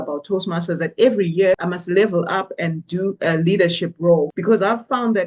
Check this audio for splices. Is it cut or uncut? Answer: cut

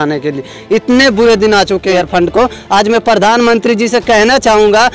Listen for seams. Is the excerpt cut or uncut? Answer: cut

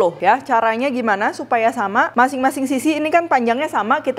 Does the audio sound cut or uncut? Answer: uncut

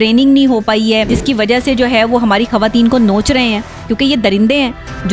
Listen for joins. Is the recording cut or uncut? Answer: cut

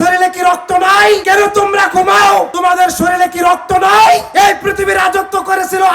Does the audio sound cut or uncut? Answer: cut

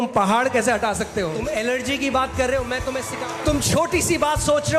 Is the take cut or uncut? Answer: cut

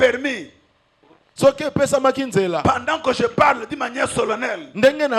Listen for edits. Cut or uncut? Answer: uncut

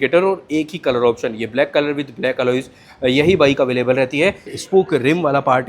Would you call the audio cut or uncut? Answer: cut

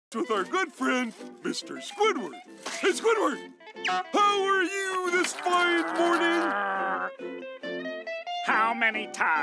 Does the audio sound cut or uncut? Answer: uncut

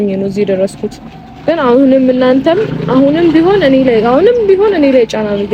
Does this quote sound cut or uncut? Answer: uncut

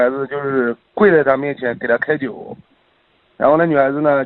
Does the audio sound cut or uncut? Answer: uncut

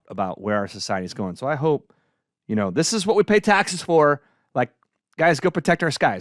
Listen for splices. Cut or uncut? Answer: uncut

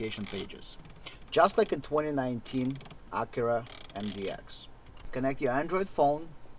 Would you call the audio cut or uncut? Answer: cut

